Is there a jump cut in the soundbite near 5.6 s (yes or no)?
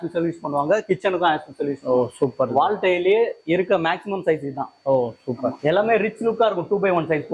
yes